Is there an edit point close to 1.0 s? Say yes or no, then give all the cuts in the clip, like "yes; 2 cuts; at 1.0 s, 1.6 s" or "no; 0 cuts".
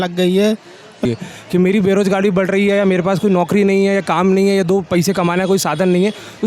yes; 1 cut; at 1.0 s